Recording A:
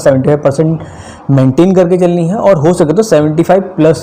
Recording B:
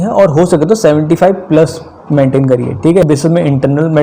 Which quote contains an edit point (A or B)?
B